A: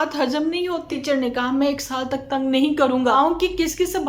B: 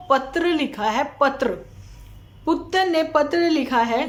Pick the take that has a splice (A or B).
A